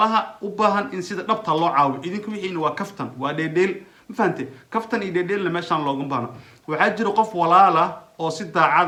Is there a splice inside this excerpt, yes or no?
no